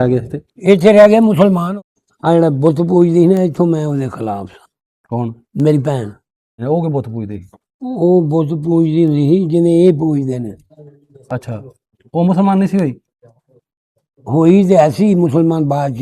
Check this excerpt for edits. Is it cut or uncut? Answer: cut